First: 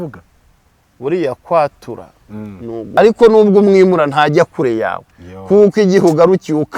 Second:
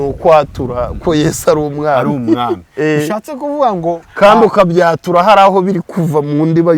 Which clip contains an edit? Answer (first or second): first